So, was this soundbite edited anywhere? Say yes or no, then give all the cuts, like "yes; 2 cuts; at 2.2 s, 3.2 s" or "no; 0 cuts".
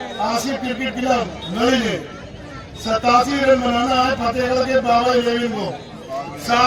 no; 0 cuts